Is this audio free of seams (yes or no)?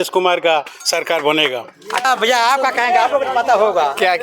no